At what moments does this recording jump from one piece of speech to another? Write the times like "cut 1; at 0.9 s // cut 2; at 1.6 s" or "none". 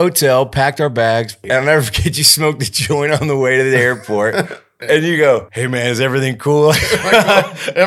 cut 1; at 1.4 s // cut 2; at 4.8 s // cut 3; at 5.5 s